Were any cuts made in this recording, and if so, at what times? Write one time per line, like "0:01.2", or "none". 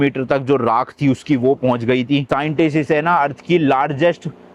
0:02.3